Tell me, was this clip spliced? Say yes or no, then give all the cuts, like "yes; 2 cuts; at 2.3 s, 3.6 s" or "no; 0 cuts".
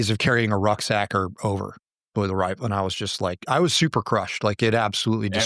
no; 0 cuts